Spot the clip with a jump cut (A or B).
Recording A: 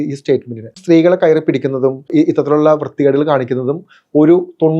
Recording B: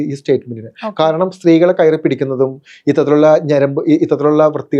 A